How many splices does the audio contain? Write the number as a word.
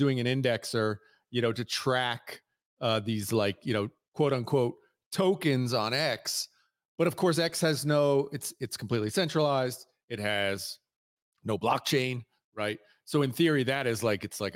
zero